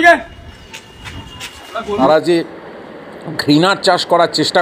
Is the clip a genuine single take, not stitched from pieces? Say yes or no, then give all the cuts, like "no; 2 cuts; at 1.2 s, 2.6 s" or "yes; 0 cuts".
no; 1 cut; at 2.0 s